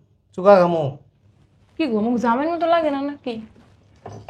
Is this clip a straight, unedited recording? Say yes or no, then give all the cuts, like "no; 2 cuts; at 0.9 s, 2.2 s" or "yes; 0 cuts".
yes; 0 cuts